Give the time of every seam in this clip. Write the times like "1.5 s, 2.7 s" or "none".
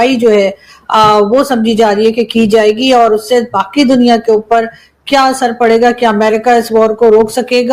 none